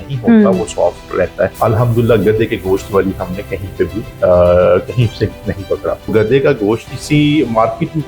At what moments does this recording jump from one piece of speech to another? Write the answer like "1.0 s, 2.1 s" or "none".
1.5 s, 6.1 s, 6.9 s